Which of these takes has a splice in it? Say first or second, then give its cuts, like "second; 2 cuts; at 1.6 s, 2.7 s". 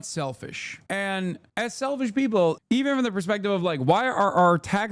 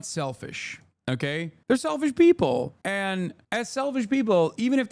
first; 2 cuts; at 0.8 s, 2.6 s